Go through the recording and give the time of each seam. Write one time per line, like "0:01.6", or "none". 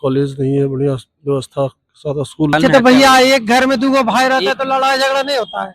0:02.5

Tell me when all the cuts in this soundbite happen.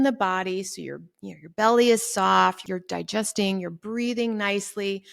0:02.6

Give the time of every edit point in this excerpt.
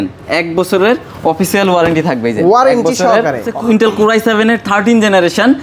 0:03.5

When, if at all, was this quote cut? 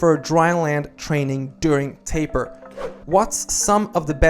0:02.7

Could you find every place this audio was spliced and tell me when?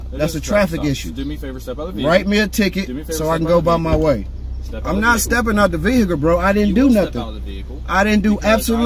none

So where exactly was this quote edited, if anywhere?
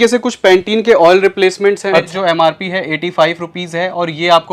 0:02.1

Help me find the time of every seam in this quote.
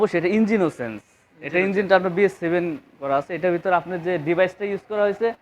none

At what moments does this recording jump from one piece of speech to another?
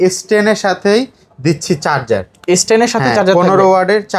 none

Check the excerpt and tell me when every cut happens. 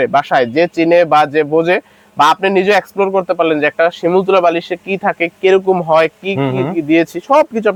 none

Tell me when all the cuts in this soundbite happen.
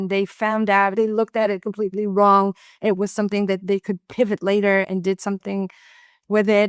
0:00.9
0:03.6
0:04.9

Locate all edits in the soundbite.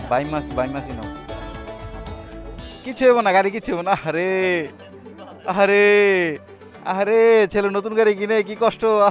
none

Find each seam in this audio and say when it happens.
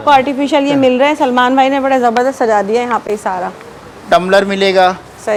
none

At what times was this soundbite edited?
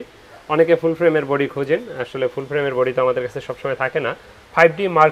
none

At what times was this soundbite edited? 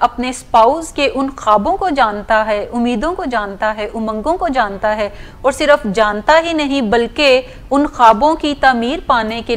none

